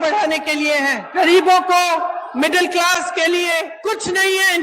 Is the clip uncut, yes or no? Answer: no